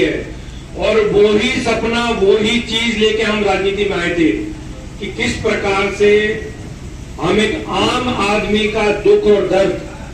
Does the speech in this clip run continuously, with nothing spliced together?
yes; 0 cuts

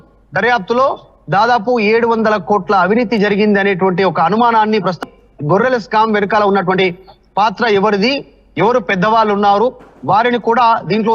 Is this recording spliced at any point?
yes; 1 cut; at 5.0 s

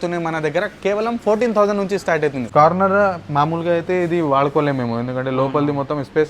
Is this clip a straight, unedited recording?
no; 1 cut; at 2.4 s

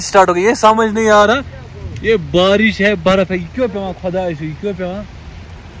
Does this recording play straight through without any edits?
yes; 0 cuts

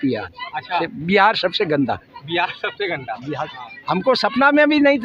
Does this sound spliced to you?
yes; 2 cuts; at 0.8 s, 3.5 s

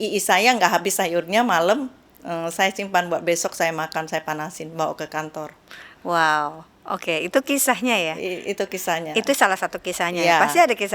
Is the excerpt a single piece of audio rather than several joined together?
yes; 0 cuts

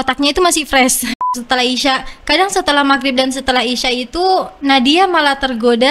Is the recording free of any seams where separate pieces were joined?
no; 1 cut; at 1.1 s

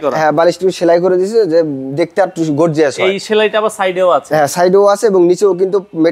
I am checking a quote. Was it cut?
no; 0 cuts

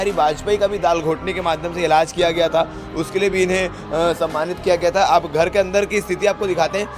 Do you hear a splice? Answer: no; 0 cuts

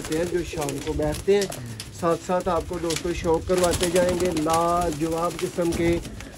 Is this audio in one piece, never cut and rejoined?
yes; 0 cuts

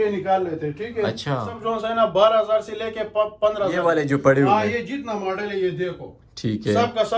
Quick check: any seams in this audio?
yes; 2 cuts; at 1.5 s, 3.8 s

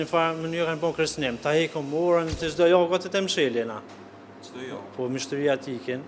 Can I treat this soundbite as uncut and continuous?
no; 1 cut; at 2.5 s

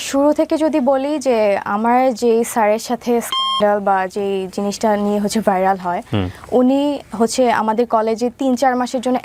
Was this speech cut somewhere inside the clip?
no; 0 cuts

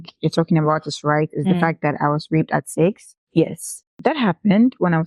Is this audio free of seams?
no; 2 cuts; at 3.1 s, 3.8 s

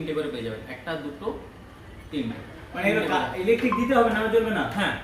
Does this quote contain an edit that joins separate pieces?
no; 0 cuts

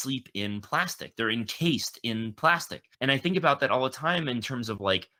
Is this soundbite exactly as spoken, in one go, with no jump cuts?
yes; 0 cuts

